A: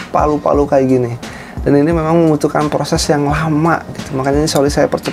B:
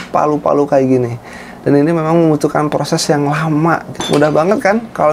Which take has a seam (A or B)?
B